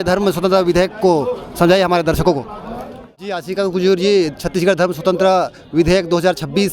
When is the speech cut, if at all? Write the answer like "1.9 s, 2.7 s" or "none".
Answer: 3.3 s